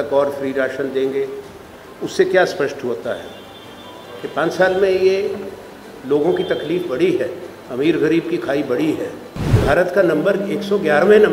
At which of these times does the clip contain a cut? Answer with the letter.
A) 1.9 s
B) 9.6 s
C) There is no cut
B